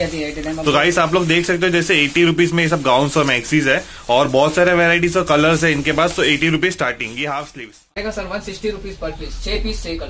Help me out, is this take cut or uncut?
cut